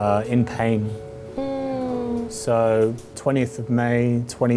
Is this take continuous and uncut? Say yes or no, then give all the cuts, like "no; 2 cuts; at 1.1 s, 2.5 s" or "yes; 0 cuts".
yes; 0 cuts